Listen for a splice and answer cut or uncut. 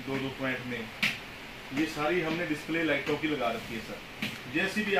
uncut